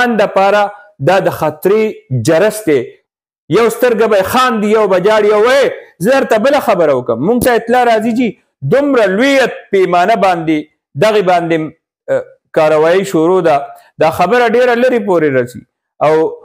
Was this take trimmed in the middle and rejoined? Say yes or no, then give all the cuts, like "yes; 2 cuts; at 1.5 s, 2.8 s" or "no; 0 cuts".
yes; 1 cut; at 3.0 s